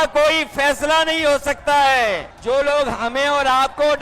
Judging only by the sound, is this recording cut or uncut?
cut